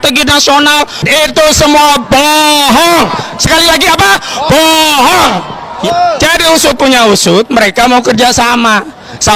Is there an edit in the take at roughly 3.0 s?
no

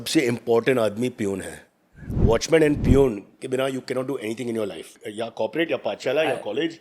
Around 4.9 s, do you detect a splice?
yes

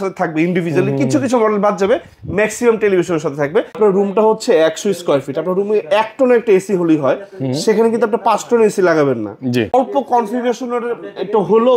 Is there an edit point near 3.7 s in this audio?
yes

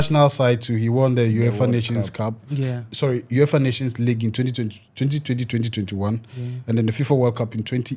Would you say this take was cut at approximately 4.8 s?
no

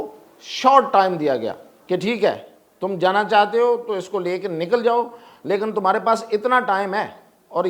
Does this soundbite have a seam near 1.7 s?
yes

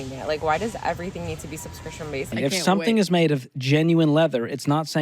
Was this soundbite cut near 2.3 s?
yes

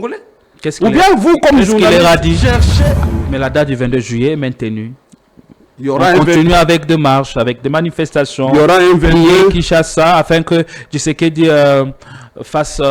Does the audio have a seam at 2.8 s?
yes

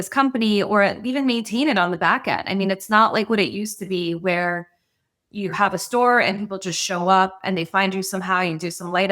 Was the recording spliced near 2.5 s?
no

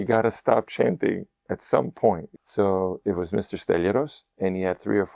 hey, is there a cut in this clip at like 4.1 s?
no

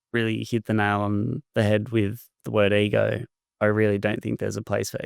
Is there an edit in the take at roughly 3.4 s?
yes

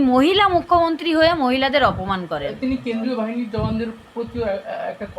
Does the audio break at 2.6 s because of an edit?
no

